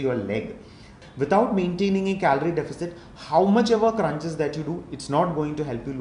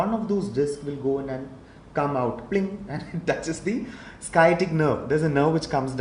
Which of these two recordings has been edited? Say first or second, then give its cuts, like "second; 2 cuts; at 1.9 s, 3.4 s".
first; 1 cut; at 1.0 s